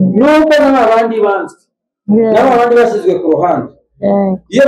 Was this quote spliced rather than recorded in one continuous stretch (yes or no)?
no